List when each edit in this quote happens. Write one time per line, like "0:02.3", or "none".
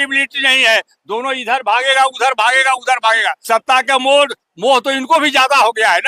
0:03.4